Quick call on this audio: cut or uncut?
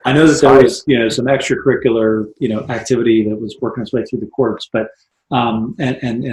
uncut